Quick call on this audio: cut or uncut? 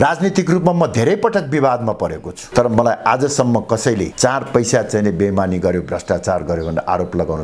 uncut